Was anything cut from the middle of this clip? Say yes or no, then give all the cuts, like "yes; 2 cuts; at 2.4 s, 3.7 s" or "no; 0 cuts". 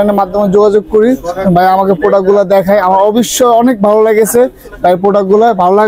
no; 0 cuts